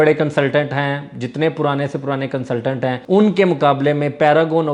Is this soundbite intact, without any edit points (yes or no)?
yes